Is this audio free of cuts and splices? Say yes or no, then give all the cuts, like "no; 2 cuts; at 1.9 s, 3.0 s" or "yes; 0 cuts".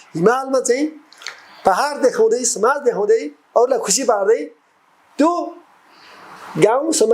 yes; 0 cuts